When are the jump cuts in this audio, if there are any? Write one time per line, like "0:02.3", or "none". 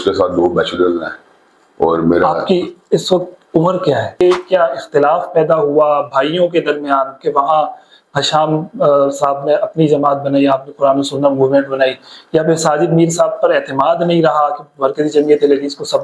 0:04.2